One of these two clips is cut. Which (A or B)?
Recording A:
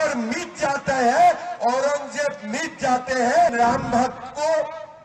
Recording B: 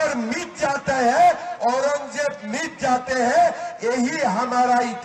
A